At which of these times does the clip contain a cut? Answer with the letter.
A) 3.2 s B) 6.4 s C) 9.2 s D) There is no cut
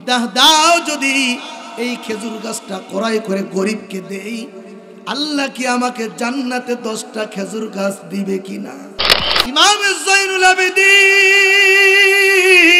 C